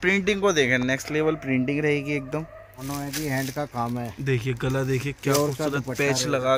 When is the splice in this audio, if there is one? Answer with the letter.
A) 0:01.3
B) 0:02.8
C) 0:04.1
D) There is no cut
B